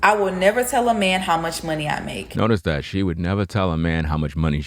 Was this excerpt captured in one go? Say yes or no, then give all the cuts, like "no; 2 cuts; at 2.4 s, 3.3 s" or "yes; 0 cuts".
yes; 0 cuts